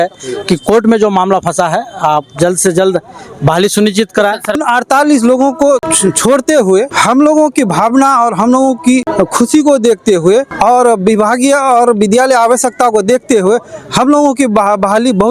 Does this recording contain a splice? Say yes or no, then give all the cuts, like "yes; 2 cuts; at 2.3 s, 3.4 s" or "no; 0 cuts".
yes; 5 cuts; at 4.6 s, 5.9 s, 6.9 s, 9.1 s, 10.5 s